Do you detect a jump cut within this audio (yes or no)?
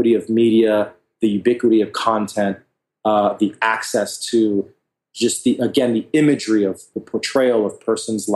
yes